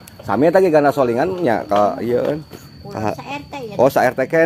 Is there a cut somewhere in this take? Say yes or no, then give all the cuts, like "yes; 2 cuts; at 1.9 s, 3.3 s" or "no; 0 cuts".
no; 0 cuts